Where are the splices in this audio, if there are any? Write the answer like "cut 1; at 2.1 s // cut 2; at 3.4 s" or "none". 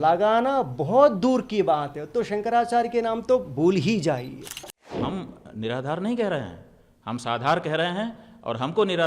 cut 1; at 5.0 s